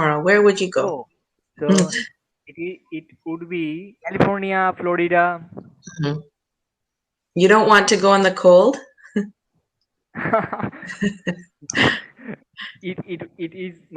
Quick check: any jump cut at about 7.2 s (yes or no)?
no